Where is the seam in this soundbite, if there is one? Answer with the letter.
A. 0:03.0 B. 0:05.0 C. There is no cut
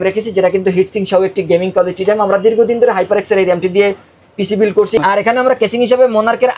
B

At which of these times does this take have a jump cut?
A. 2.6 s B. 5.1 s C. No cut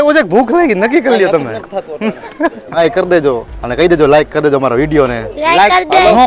A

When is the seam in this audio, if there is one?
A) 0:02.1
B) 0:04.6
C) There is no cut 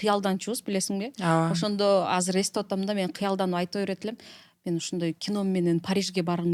C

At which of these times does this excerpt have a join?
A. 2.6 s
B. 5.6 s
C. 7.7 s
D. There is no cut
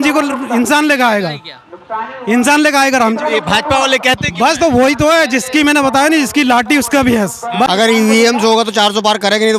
C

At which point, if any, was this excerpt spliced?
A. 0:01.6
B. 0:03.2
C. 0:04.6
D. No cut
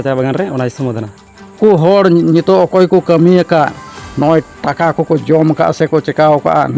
A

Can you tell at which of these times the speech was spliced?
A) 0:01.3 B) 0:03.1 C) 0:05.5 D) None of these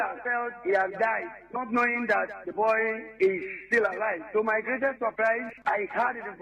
C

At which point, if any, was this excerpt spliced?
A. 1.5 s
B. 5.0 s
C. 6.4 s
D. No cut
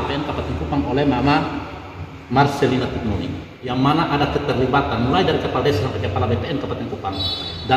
D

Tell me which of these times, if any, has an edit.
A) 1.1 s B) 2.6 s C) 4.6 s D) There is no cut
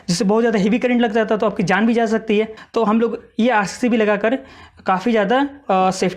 B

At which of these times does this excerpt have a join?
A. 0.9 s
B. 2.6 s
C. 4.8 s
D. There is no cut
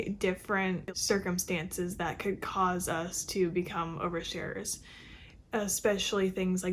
A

